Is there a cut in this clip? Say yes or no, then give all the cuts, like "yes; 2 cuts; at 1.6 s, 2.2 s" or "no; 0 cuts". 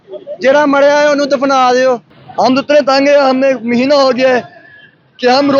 yes; 1 cut; at 2.2 s